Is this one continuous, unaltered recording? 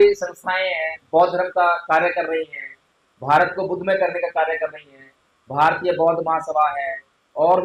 yes; 0 cuts

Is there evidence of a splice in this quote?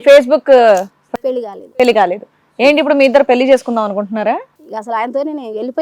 no; 0 cuts

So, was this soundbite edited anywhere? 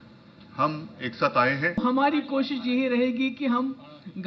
yes; 1 cut; at 1.8 s

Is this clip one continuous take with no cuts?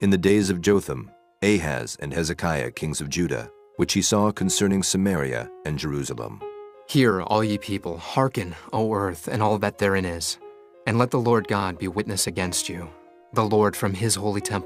yes; 0 cuts

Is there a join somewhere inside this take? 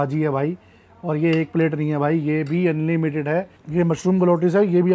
yes; 1 cut; at 3.6 s

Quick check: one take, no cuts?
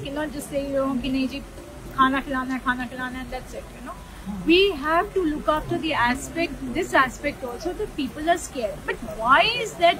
yes; 0 cuts

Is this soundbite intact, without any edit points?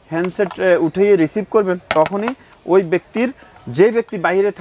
yes; 0 cuts

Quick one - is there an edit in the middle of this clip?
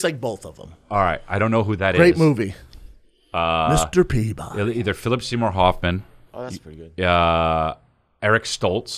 no; 0 cuts

